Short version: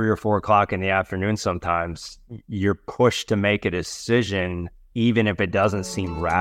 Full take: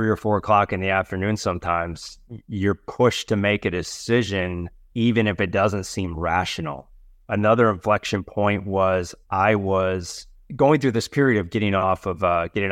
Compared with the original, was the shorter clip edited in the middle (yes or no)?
no